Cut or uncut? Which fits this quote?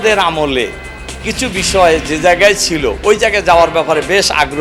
uncut